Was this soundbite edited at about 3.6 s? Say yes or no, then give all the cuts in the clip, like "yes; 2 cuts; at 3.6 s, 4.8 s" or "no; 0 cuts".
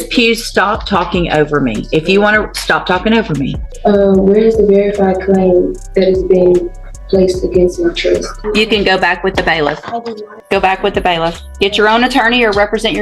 yes; 3 cuts; at 3.6 s, 8.3 s, 10.4 s